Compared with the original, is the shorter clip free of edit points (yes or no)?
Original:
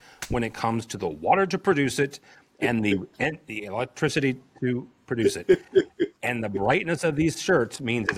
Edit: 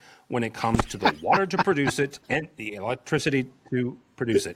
no